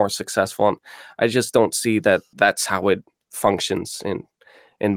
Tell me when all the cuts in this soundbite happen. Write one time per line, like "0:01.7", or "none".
0:02.3